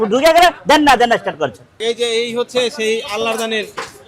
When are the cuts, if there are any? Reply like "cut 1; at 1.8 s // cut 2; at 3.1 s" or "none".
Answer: cut 1; at 1.8 s